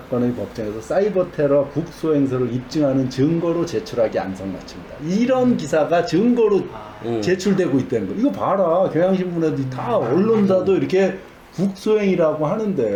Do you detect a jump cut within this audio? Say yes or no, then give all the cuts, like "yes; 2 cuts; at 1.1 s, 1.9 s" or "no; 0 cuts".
no; 0 cuts